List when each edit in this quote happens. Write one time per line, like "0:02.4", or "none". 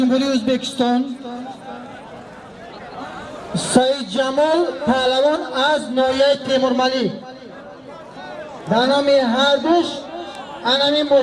none